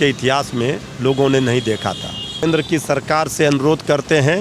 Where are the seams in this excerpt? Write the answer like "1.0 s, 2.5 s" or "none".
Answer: 2.4 s